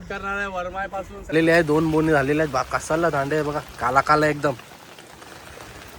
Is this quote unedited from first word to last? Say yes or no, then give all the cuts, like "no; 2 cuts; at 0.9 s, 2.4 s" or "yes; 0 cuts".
no; 1 cut; at 1.3 s